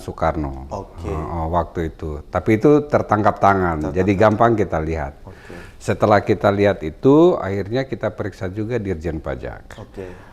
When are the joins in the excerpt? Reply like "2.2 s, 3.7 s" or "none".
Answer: none